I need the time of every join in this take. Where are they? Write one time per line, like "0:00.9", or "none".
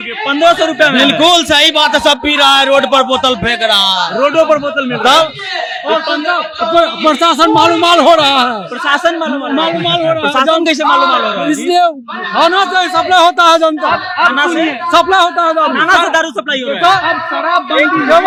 none